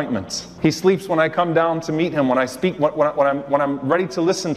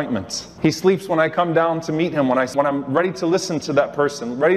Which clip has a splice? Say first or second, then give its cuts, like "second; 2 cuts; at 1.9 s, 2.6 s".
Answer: second; 1 cut; at 2.5 s